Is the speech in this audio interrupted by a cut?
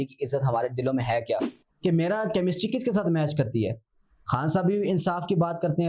yes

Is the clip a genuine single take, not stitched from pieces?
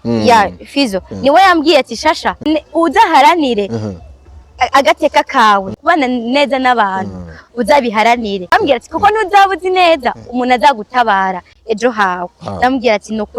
no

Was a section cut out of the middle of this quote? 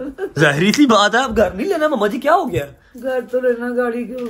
no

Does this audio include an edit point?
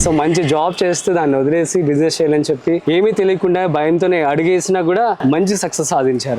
yes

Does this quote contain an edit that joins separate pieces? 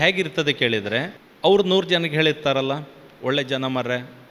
yes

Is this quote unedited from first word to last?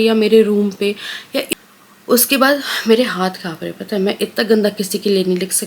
no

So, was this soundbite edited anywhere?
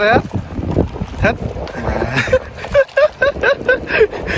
no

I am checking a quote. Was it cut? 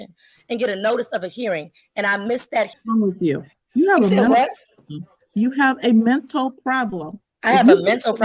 yes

